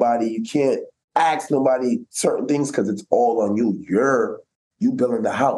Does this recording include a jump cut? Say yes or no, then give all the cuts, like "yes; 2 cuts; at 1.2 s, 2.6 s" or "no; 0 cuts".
no; 0 cuts